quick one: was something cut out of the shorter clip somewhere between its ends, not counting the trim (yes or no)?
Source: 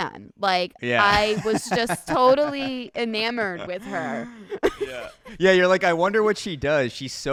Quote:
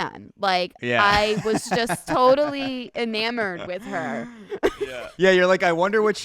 yes